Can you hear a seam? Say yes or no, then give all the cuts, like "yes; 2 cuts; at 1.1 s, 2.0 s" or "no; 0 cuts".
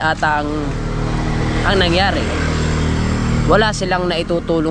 no; 0 cuts